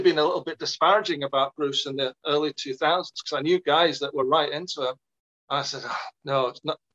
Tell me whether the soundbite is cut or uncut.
uncut